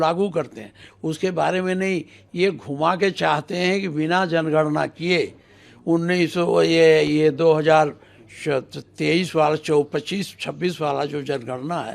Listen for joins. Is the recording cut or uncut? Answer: uncut